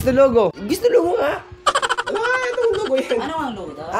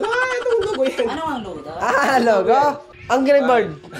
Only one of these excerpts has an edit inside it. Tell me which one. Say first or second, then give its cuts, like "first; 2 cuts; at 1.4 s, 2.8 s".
second; 1 cut; at 2.9 s